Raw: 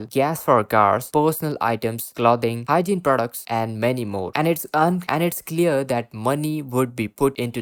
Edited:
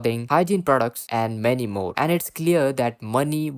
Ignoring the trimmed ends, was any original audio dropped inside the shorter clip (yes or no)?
yes